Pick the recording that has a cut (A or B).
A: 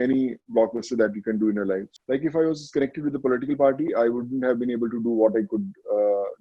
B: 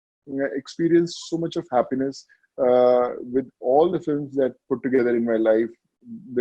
A